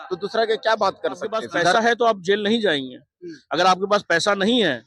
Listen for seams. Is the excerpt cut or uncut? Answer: cut